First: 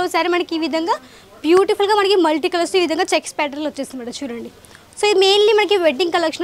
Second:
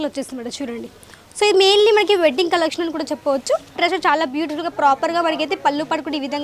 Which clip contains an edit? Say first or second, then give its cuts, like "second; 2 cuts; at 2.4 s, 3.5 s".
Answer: second; 1 cut; at 3.8 s